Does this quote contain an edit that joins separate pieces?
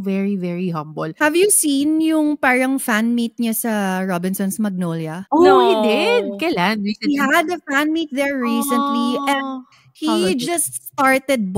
yes; 2 cuts; at 1.1 s, 5.1 s

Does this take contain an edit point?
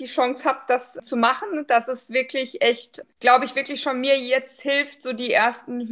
yes; 2 cuts; at 1.0 s, 2.9 s

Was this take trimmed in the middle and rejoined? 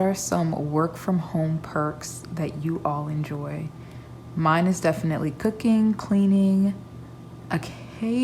no; 0 cuts

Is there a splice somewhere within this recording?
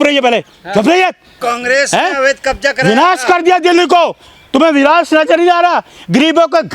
yes; 1 cut; at 1.4 s

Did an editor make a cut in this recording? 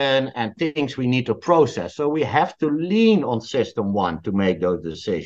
no; 0 cuts

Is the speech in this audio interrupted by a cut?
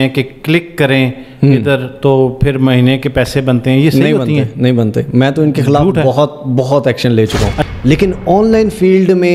yes; 1 cut; at 7.6 s

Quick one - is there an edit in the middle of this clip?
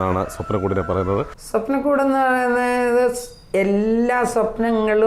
yes; 1 cut; at 1.4 s

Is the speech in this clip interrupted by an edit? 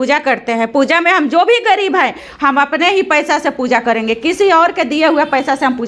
no; 0 cuts

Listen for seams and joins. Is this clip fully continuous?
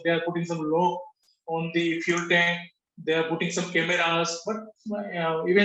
yes; 0 cuts

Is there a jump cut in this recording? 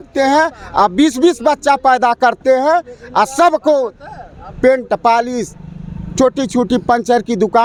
no; 0 cuts

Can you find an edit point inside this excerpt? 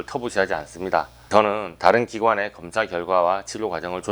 yes; 1 cut; at 1.3 s

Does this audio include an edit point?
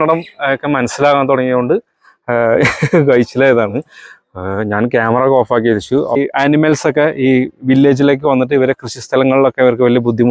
yes; 1 cut; at 6.2 s

